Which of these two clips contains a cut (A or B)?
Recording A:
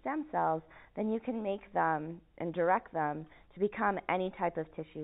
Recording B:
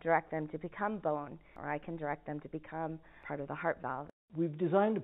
B